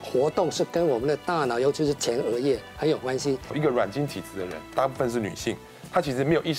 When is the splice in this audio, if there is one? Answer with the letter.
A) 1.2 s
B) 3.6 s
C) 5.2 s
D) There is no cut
B